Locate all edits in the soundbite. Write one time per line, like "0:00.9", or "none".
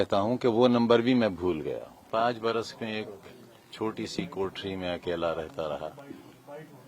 0:02.0